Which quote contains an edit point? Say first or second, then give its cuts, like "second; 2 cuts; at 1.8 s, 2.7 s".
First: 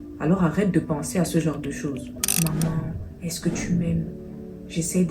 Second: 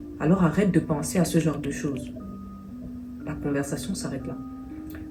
first; 1 cut; at 2.2 s